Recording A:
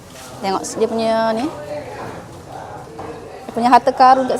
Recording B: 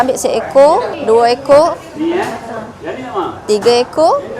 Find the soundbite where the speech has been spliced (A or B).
B